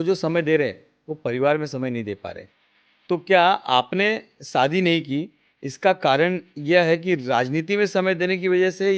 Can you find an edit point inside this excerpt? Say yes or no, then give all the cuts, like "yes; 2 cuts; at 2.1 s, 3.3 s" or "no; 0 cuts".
no; 0 cuts